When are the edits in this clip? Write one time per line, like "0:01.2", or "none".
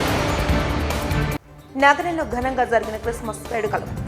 none

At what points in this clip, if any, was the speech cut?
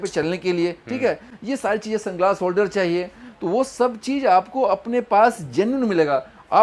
none

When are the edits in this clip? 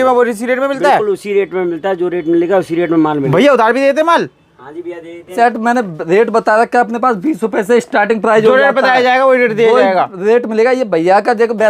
0:03.3
0:05.3

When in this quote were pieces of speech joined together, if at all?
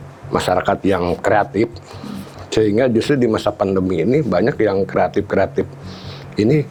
none

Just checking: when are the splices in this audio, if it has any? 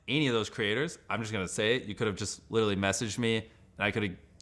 none

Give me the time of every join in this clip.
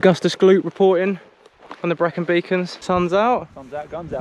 0:02.8

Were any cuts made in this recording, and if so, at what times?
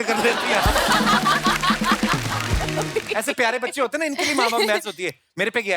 0:02.8

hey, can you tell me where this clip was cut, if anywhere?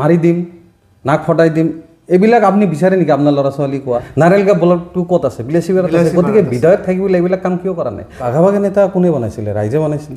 0:04.1
0:08.2

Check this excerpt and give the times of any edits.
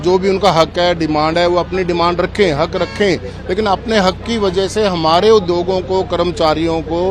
none

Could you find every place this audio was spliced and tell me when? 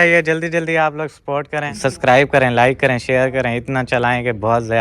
0:01.7

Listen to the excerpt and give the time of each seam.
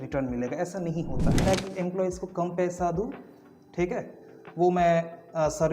0:01.4

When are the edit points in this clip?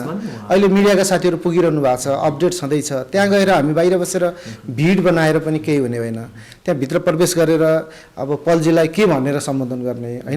none

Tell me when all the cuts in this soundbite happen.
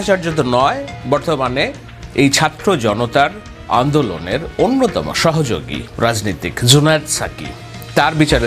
none

